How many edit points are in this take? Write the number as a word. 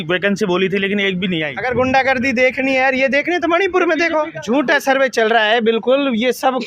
two